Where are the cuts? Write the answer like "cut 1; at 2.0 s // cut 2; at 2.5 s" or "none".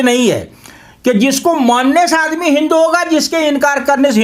none